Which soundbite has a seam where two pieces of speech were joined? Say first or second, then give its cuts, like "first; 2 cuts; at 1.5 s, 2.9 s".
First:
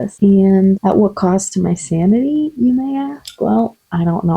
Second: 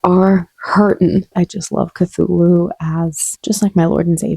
second; 1 cut; at 1.3 s